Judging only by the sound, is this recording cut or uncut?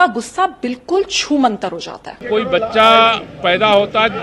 cut